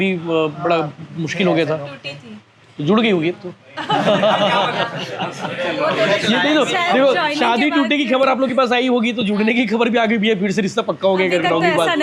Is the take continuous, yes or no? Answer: yes